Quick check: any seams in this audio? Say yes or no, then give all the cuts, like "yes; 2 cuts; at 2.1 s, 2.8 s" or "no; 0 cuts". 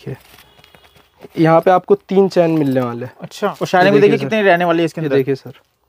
yes; 1 cut; at 3.6 s